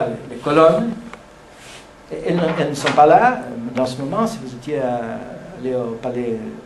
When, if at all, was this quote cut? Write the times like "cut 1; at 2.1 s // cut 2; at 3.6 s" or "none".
cut 1; at 3.1 s